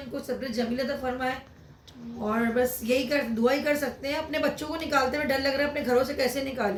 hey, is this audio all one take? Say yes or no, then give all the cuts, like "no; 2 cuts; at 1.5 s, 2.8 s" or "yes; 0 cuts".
yes; 0 cuts